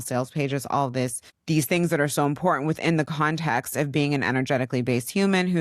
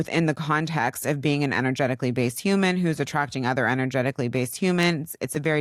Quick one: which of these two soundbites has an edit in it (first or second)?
first